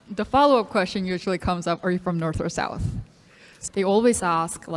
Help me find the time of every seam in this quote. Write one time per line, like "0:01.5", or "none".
0:03.5